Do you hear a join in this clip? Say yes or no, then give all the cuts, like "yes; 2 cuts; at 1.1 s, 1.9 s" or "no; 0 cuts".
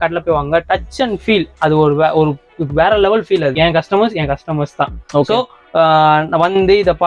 yes; 1 cut; at 3.5 s